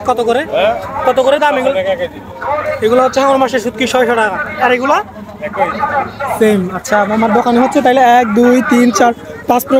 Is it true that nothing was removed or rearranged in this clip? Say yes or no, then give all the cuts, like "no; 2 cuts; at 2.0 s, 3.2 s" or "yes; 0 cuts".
yes; 0 cuts